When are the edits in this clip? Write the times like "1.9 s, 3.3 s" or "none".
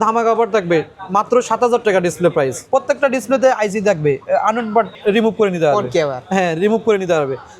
2.6 s, 4.9 s

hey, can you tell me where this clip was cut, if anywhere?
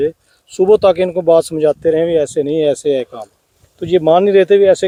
none

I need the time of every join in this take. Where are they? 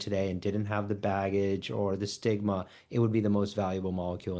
none

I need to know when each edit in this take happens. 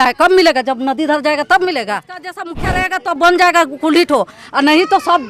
2.5 s

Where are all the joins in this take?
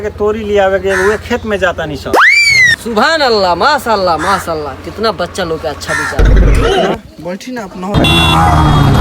7.9 s

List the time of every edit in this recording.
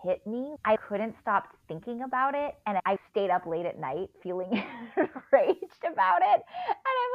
0.8 s, 2.8 s, 4.1 s

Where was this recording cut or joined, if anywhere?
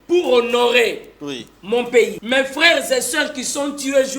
2.2 s

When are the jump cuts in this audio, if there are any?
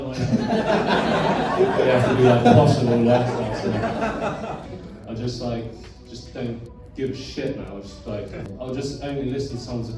4.6 s, 8.5 s

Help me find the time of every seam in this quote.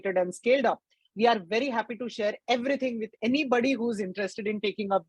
none

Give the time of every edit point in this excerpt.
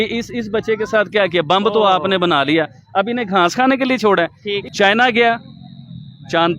4.5 s

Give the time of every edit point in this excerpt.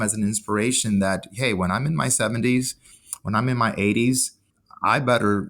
4.3 s

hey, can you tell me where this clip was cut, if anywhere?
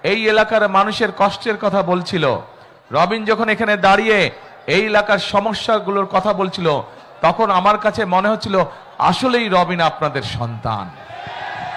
none

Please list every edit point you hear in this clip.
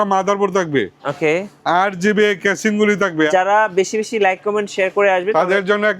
3.3 s

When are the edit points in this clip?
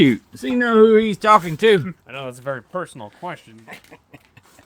2.1 s

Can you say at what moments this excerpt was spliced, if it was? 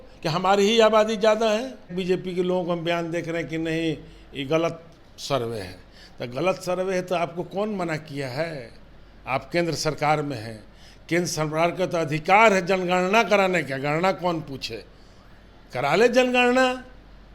1.9 s

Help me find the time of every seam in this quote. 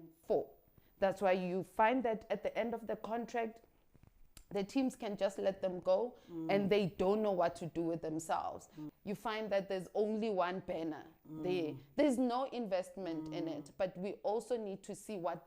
8.8 s

